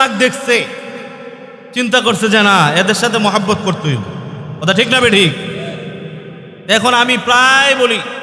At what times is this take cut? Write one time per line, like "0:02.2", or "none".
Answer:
none